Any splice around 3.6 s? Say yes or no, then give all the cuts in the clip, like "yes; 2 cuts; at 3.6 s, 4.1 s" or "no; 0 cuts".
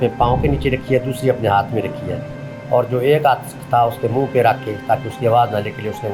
no; 0 cuts